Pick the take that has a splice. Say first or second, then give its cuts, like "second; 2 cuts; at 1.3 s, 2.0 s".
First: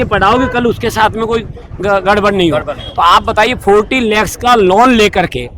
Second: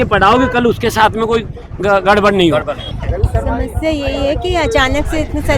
second; 1 cut; at 2.8 s